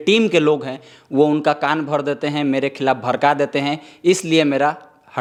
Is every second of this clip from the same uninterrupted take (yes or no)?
yes